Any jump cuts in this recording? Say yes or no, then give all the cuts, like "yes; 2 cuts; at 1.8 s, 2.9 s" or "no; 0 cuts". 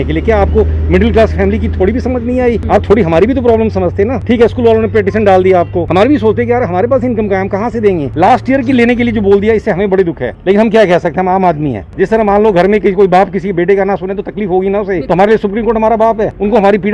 no; 0 cuts